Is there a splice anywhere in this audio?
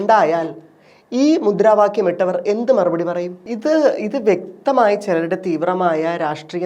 yes; 1 cut; at 3.4 s

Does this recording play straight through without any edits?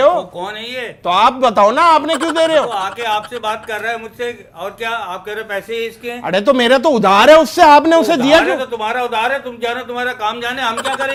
yes; 0 cuts

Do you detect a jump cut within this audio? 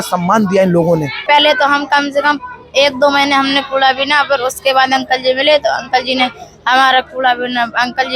yes; 1 cut; at 1.2 s

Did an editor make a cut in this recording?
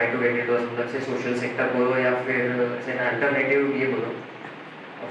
no; 0 cuts

